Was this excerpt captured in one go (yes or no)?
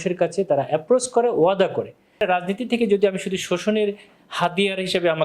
no